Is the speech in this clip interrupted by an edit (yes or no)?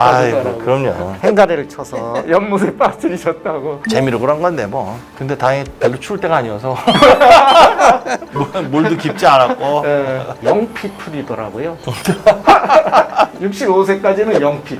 yes